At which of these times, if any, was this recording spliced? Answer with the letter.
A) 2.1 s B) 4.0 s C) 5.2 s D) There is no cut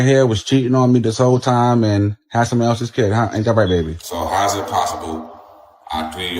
B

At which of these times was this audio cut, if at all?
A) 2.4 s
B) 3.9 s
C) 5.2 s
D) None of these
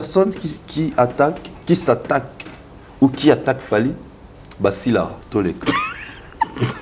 C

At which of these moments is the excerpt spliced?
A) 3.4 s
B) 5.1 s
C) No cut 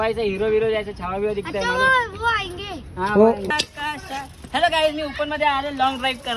A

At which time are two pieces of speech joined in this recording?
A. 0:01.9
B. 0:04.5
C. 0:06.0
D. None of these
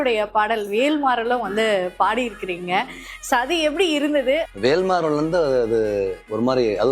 B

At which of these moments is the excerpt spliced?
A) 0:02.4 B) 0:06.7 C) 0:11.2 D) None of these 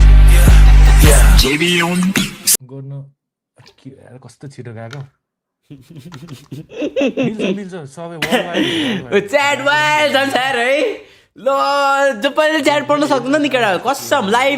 A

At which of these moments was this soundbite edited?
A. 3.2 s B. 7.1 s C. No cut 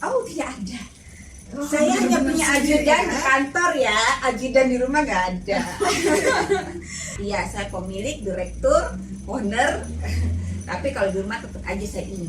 B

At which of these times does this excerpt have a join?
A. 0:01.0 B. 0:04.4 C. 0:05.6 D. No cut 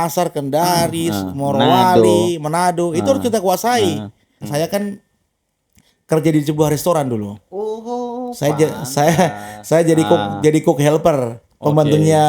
B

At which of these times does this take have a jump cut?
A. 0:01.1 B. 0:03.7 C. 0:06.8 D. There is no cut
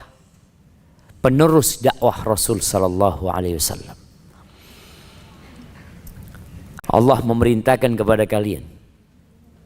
C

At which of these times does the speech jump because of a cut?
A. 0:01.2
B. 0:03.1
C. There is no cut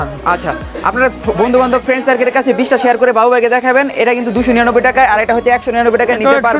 C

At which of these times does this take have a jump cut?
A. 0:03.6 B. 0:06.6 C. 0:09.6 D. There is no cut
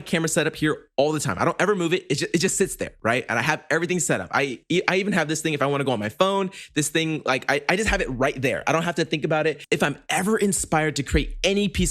C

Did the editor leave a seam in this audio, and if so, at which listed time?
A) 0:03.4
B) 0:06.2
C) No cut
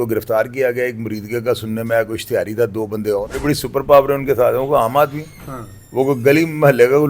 A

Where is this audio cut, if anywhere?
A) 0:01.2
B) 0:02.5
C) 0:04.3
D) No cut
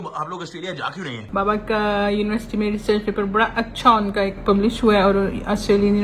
A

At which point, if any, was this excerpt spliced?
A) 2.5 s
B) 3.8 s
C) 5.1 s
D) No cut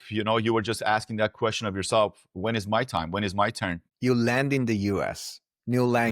B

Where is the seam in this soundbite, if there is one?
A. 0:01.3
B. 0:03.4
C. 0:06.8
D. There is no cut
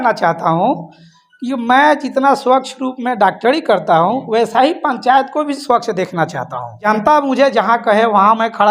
C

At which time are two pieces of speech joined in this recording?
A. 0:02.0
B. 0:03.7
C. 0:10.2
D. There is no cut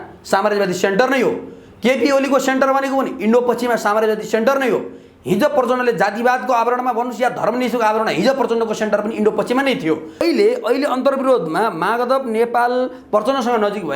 C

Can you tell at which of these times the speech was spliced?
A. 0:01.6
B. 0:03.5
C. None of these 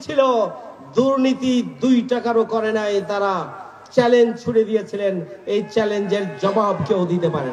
C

